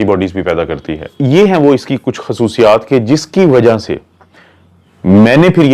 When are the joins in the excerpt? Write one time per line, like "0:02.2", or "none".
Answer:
0:01.1